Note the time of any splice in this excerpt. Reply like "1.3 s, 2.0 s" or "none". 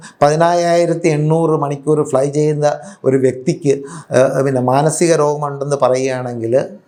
none

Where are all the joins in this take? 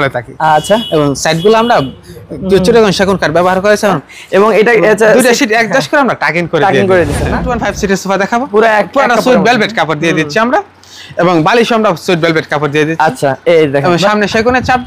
4.0 s, 7.5 s

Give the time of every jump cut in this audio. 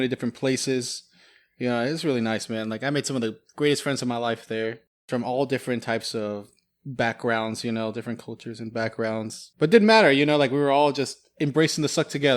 9.4 s

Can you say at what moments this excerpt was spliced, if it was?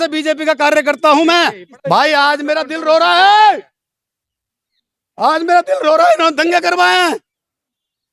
1.7 s

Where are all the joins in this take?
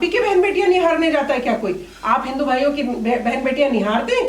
none

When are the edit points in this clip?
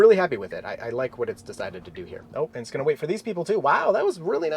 2.2 s

